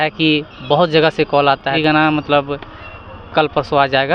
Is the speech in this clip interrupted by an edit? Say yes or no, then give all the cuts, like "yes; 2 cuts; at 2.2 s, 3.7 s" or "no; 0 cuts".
yes; 1 cut; at 1.7 s